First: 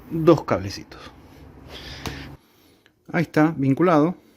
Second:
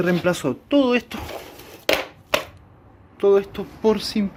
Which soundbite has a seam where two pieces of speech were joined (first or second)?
first